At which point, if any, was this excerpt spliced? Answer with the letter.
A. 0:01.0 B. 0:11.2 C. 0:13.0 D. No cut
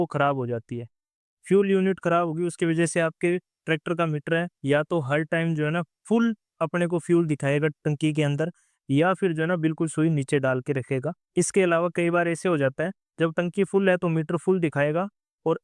D